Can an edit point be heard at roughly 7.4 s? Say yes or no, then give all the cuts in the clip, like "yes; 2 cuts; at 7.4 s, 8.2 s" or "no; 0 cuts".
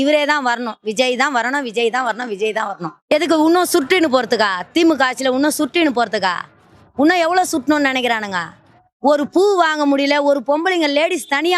no; 1 cut; at 3.1 s